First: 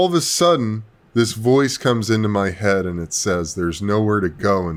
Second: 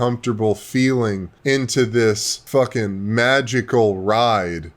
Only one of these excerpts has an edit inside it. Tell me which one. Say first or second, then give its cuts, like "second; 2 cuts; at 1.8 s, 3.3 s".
second; 2 cuts; at 1.3 s, 2.3 s